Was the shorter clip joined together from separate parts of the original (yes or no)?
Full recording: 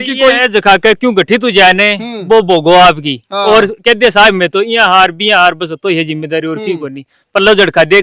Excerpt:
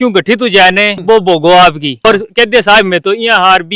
yes